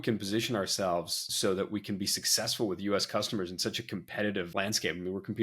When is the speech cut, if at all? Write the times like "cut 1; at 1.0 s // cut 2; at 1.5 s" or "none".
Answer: none